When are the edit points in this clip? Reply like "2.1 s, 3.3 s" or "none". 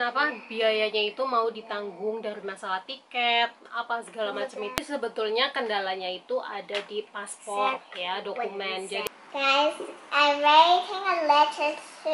4.8 s, 9.3 s